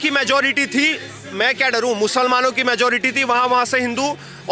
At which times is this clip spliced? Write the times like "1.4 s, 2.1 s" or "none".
none

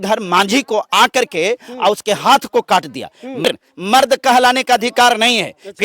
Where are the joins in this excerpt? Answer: 3.4 s

